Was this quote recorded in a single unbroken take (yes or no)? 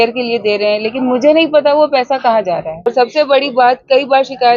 no